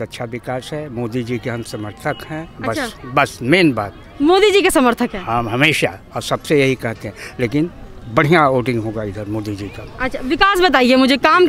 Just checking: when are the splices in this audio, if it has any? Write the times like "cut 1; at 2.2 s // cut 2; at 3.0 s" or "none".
none